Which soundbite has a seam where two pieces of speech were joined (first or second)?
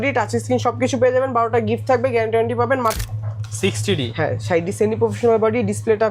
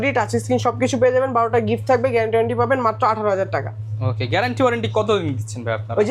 first